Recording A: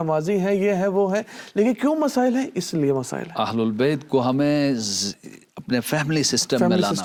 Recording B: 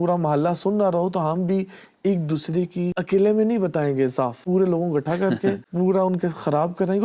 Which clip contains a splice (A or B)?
B